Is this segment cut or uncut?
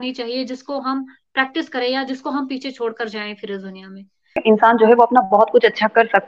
cut